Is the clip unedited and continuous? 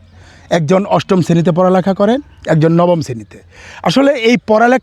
yes; 0 cuts

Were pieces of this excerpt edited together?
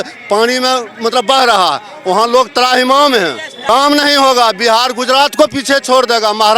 yes; 1 cut; at 3.5 s

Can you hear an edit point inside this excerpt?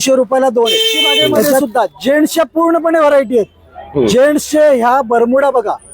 yes; 1 cut; at 1.7 s

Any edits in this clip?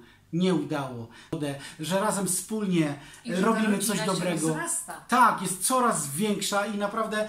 yes; 1 cut; at 1.3 s

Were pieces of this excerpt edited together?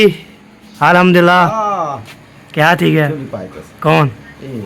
no; 0 cuts

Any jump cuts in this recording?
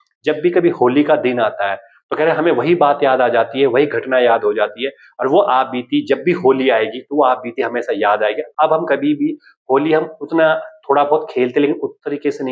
no; 0 cuts

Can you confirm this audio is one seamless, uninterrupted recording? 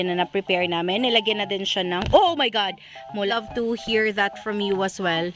no; 1 cut; at 3.2 s

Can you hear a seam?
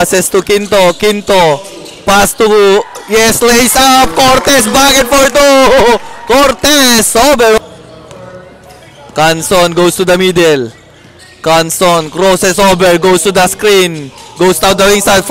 no; 0 cuts

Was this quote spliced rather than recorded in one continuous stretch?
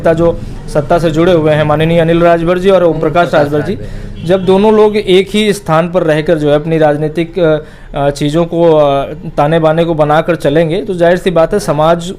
no; 0 cuts

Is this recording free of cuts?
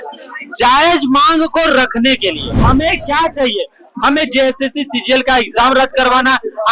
no; 1 cut; at 2.5 s

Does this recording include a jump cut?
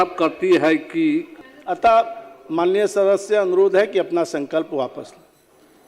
yes; 1 cut; at 1.4 s

